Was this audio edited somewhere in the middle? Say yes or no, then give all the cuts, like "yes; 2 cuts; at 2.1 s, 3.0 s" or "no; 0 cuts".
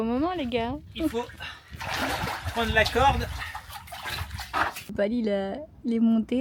yes; 1 cut; at 4.9 s